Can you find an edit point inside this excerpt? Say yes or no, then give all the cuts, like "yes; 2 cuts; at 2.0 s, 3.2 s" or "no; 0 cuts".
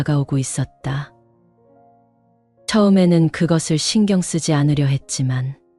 no; 0 cuts